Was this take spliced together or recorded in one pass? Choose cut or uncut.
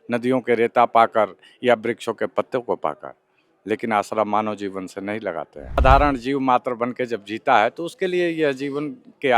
cut